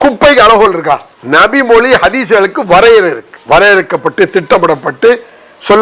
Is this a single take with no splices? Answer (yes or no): no